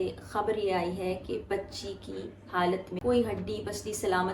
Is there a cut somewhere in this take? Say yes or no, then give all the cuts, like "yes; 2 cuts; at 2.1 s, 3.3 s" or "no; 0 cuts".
yes; 1 cut; at 2.9 s